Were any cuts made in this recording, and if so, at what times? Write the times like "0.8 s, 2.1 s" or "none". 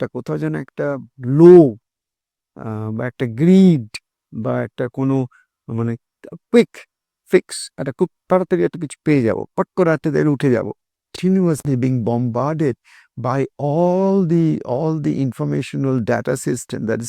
11.1 s